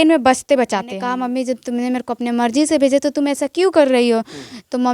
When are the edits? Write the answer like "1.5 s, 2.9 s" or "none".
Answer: 1.0 s